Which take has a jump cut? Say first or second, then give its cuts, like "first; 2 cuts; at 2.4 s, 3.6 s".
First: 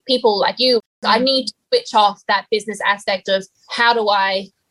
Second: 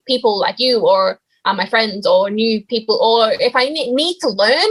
first; 2 cuts; at 0.8 s, 3.6 s